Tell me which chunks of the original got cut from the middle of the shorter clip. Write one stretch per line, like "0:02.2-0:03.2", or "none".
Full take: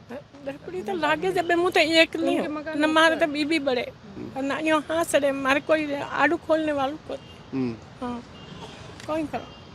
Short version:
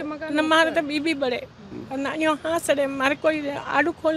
none